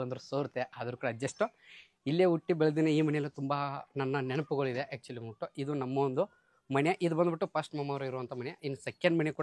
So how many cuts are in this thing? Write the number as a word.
zero